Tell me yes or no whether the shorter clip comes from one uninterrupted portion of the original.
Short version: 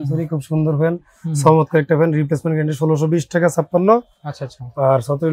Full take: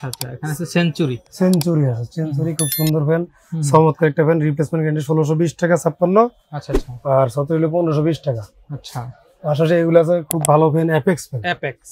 yes